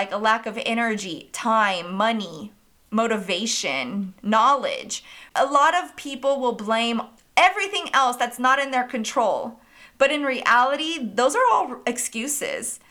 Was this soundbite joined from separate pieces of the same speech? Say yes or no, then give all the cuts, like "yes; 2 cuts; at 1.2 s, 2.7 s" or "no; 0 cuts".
yes; 2 cuts; at 5.2 s, 7.2 s